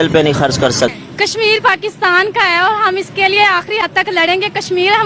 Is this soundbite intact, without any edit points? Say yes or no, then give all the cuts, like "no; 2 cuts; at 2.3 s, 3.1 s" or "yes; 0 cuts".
no; 1 cut; at 0.9 s